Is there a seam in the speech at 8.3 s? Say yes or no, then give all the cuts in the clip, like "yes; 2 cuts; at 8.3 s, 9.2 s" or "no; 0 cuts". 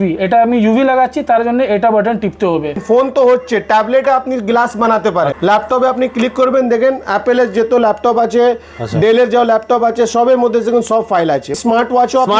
no; 3 cuts; at 2.8 s, 5.3 s, 11.5 s